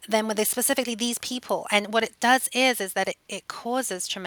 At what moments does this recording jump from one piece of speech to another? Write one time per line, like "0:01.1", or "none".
none